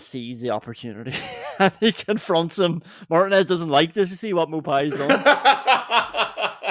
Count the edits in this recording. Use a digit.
1